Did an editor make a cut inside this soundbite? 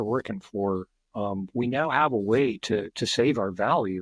no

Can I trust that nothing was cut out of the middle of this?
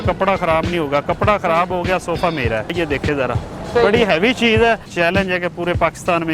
no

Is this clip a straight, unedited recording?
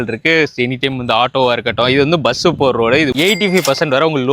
no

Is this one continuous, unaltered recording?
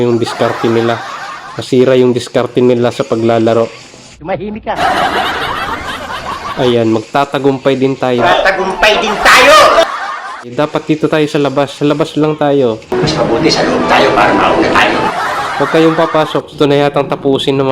no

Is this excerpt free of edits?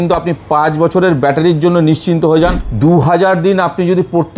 no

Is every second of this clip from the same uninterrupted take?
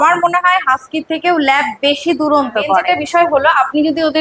yes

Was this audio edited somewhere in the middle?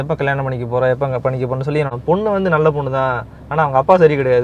yes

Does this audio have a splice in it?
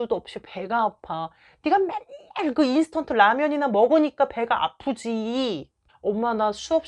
no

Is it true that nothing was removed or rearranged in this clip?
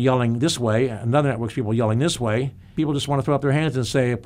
no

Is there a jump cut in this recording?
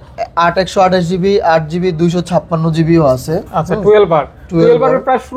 no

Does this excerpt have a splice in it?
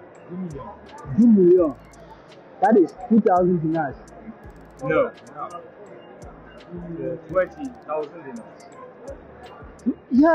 no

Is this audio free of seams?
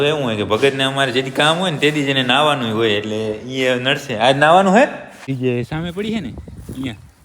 no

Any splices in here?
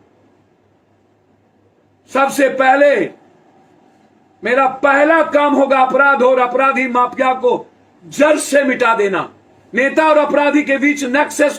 no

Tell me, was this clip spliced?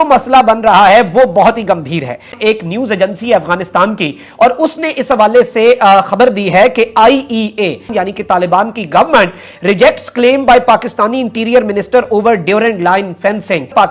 no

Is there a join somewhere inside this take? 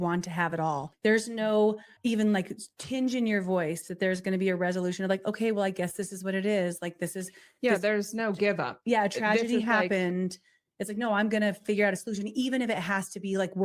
yes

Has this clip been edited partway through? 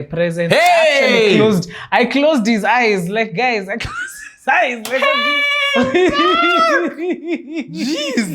no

